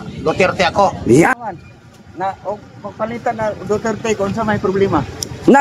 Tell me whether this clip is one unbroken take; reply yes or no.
no